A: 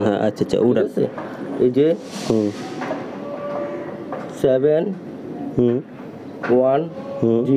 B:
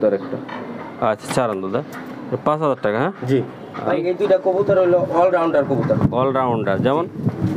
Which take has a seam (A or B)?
B